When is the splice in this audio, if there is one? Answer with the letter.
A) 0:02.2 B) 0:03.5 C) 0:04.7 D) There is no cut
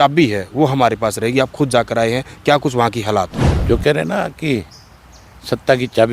B